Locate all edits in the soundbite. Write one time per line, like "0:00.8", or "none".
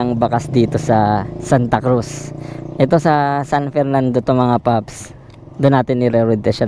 none